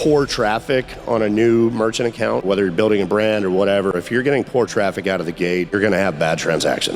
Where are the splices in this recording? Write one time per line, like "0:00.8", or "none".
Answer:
0:02.5
0:05.7